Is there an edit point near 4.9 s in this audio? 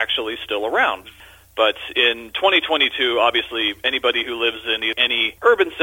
yes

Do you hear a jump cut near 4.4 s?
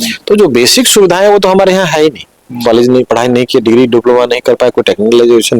no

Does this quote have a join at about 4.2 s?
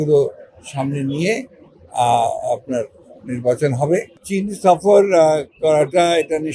yes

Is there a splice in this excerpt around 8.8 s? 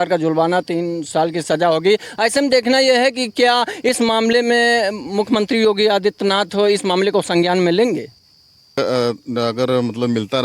yes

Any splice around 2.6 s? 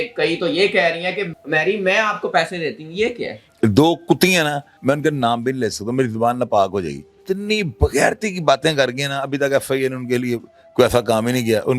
no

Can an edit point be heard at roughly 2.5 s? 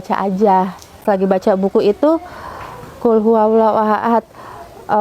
no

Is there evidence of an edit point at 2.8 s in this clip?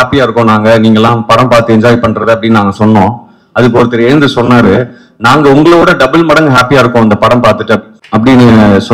no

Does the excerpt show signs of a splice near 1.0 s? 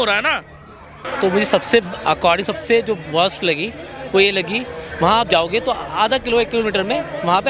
yes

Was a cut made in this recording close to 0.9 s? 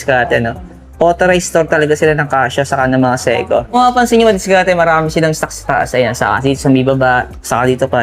no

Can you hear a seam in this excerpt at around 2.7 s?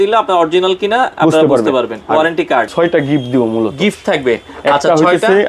yes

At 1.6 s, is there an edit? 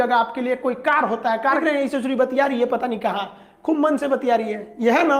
yes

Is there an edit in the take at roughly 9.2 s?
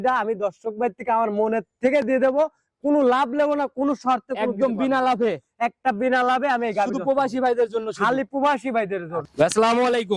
yes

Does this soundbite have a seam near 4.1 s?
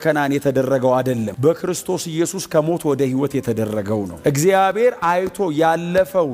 no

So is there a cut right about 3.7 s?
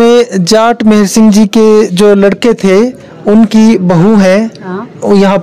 no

